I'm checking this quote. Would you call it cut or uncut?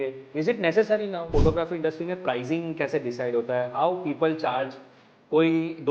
cut